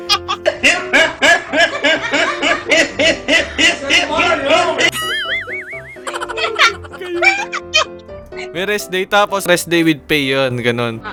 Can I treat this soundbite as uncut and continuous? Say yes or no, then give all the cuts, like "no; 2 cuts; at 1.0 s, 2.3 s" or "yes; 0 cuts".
yes; 0 cuts